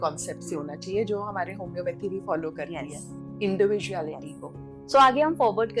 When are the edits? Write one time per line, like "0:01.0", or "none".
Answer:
none